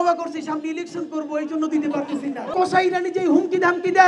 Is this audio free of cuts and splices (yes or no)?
no